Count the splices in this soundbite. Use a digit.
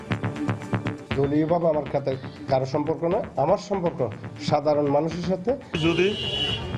2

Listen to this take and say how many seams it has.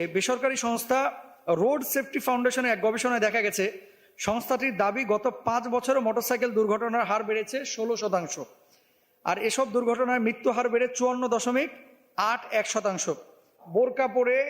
1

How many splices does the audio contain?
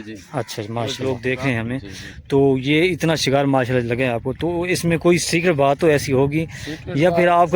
1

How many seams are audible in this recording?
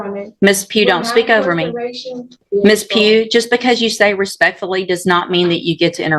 1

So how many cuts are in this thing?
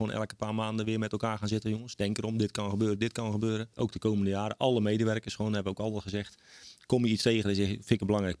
1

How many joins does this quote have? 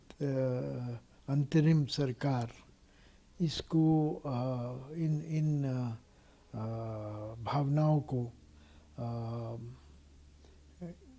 0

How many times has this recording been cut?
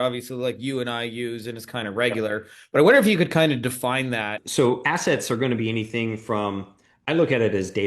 1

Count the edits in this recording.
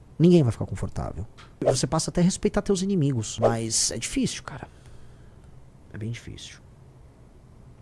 2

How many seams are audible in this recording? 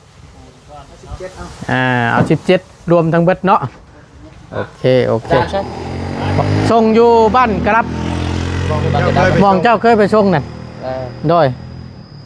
1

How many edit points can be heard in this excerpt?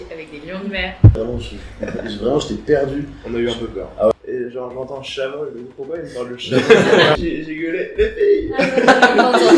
3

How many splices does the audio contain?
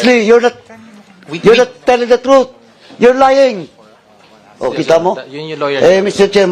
1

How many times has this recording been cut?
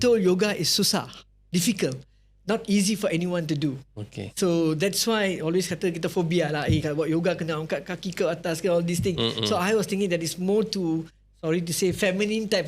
0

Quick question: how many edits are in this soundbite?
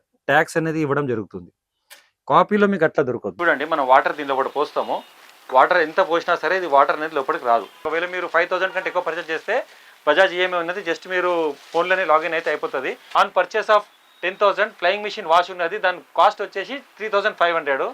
3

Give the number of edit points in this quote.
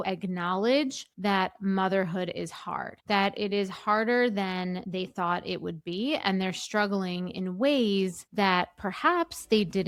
0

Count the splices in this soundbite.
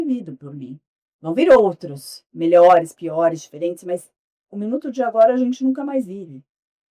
0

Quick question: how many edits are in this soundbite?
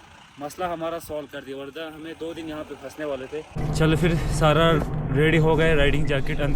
1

